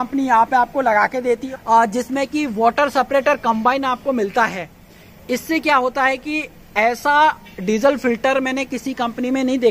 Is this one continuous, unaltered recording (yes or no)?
yes